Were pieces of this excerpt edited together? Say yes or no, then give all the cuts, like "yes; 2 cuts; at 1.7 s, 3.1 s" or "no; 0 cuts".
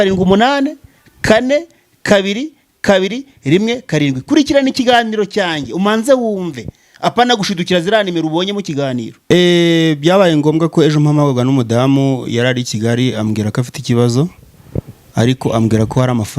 yes; 1 cut; at 9.1 s